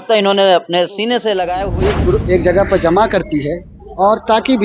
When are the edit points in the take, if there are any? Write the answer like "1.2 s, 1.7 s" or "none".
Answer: 1.6 s

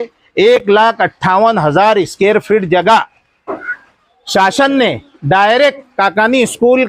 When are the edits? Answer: none

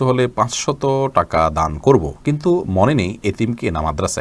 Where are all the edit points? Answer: none

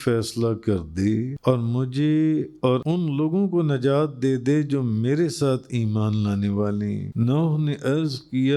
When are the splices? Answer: 1.3 s, 2.8 s, 7.1 s

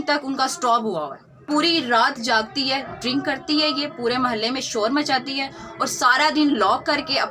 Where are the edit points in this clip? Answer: 1.2 s

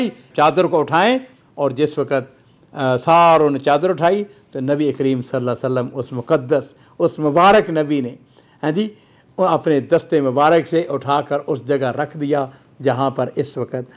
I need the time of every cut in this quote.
none

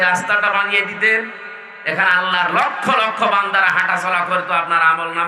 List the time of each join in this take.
none

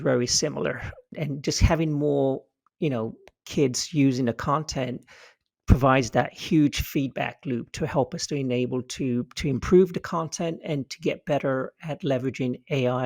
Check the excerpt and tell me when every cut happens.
1.2 s

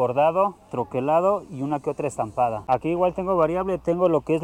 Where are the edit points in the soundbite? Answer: 2.6 s

